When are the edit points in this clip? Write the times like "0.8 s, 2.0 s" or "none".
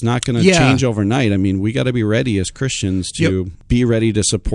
3.6 s